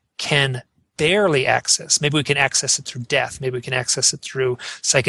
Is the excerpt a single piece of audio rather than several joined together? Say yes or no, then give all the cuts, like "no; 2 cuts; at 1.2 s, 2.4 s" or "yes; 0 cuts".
yes; 0 cuts